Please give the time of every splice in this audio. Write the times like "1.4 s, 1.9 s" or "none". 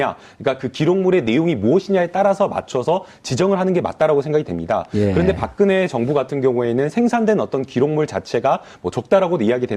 none

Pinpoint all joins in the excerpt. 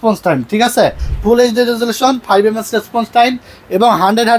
1.1 s

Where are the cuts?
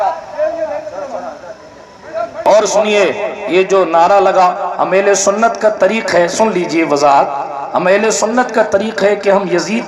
2.4 s

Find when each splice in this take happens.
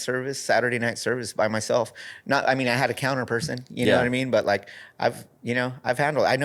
none

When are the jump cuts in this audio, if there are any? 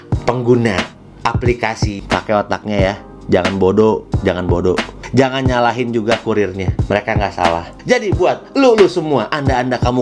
1.9 s

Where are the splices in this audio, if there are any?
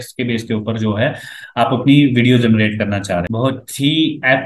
3.3 s

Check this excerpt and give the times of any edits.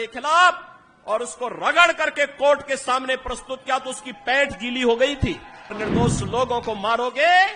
5.8 s

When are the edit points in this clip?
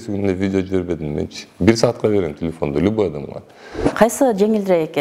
3.9 s

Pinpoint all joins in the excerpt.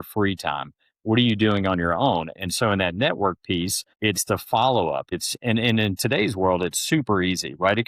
3.8 s, 5.1 s

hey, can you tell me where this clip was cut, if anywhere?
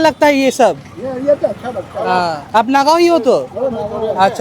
2.4 s

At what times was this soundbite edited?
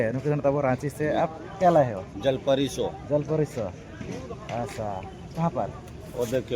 none

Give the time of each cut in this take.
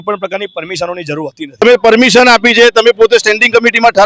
1.6 s

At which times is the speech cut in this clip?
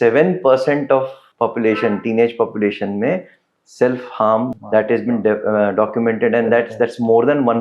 1.2 s, 4.5 s

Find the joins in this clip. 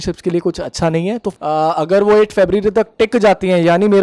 1.3 s

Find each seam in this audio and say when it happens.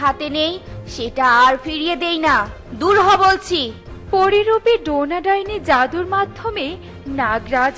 none

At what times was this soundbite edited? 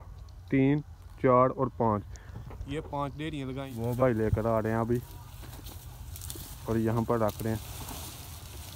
3.7 s

